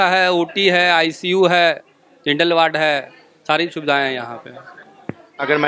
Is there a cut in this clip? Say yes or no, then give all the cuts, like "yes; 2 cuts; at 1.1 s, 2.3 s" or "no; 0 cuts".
no; 0 cuts